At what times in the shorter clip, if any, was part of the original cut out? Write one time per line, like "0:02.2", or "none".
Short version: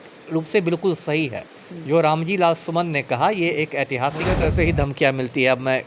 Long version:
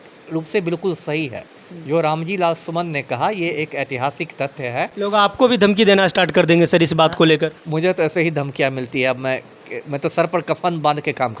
0:04.3